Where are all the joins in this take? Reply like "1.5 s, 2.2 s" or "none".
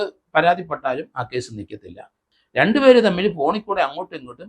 2.2 s